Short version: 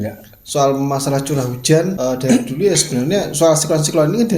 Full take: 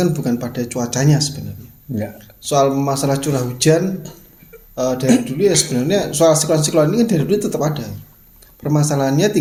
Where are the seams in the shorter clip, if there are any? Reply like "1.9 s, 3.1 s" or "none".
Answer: 2.0 s